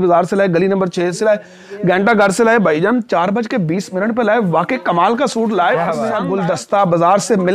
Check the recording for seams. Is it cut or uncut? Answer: cut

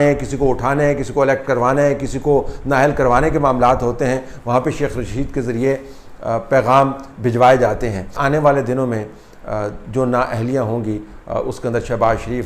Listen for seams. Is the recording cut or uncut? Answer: cut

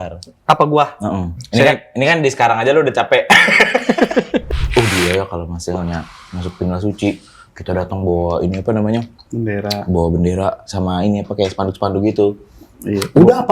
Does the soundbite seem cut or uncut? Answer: cut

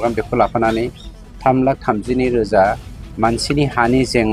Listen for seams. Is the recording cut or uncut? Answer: uncut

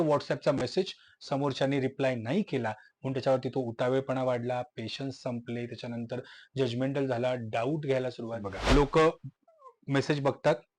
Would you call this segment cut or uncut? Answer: cut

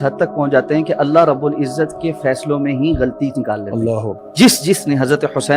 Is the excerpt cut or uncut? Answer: cut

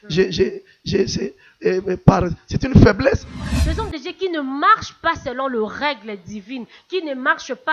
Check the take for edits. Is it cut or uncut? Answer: cut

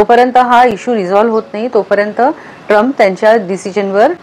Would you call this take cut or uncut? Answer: uncut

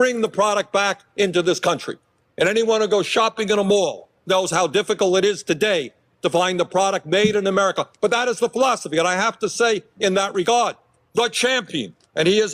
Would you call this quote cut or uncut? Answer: uncut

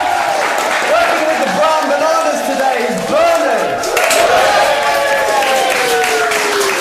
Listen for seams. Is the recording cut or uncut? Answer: uncut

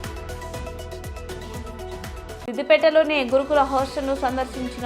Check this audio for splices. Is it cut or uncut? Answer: cut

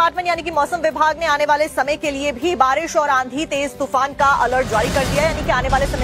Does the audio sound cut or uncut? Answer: cut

